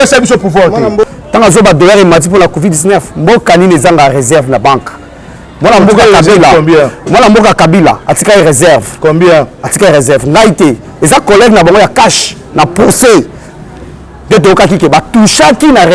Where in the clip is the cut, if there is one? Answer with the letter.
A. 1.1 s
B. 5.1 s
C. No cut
A